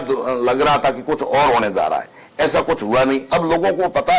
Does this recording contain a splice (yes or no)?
no